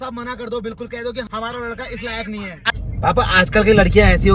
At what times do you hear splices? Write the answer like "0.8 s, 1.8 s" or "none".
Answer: 1.3 s, 2.6 s